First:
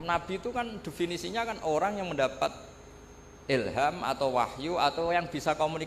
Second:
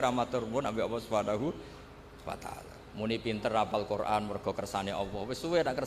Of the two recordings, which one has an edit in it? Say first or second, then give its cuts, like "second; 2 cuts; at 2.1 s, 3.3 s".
second; 1 cut; at 2.8 s